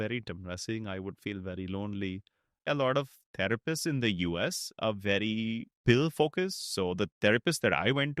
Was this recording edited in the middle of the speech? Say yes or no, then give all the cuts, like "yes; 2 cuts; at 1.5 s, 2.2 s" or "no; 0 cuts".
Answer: yes; 1 cut; at 2.7 s